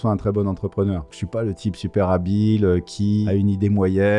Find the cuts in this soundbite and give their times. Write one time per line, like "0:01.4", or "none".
0:01.1
0:03.3